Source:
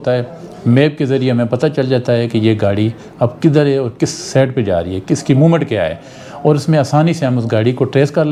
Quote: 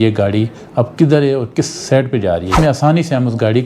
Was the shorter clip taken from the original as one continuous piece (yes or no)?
no